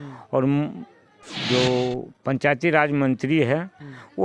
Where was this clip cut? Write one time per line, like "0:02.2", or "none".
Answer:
none